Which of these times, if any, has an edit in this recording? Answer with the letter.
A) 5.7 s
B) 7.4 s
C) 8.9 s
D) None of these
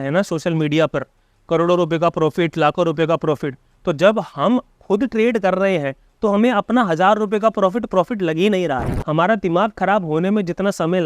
C